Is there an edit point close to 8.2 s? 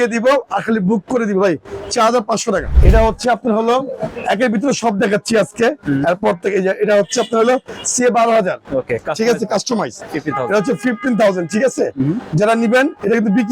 no; 2 cuts; at 2.7 s, 10.0 s

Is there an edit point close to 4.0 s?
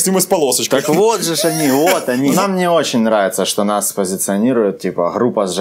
no; 1 cut; at 2.4 s

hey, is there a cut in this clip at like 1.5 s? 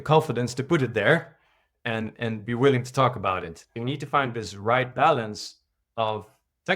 no; 1 cut; at 3.6 s

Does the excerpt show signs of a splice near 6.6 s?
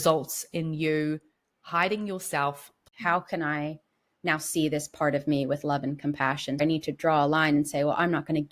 yes; 2 cuts; at 2.9 s, 6.6 s

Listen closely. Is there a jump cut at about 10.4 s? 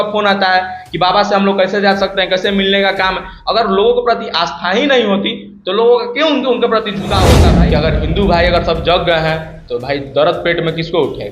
no; 1 cut; at 7.4 s

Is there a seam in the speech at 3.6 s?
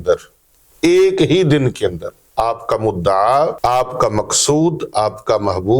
yes; 1 cut; at 3.6 s

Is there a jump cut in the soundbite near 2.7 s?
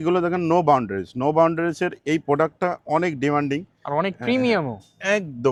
no; 0 cuts

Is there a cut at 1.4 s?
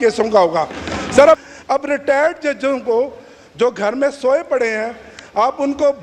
yes; 1 cut; at 1.4 s

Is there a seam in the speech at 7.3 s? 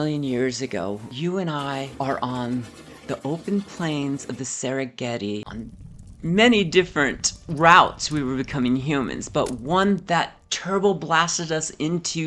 no; 1 cut; at 5.5 s

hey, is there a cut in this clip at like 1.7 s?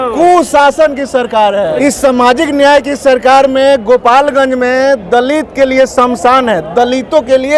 yes; 1 cut; at 1.7 s

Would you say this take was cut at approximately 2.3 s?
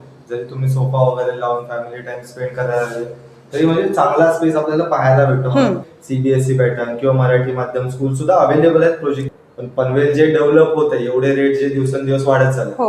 no; 2 cuts; at 5.9 s, 9.3 s

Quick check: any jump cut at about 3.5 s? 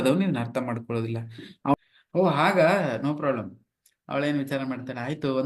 no; 1 cut; at 1.7 s

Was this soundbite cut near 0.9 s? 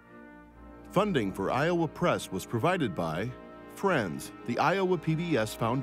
yes; 1 cut; at 0.9 s

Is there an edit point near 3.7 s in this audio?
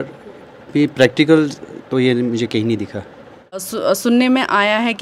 yes; 1 cut; at 3.7 s

